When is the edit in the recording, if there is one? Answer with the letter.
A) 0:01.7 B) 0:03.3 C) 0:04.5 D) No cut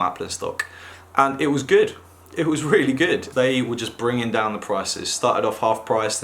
B